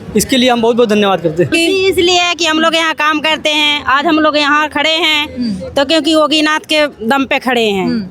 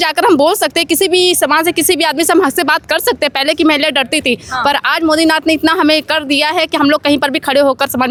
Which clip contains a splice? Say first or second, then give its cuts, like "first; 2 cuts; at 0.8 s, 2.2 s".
first; 1 cut; at 1.5 s